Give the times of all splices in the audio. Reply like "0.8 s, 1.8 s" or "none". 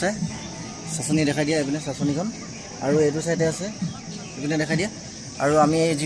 none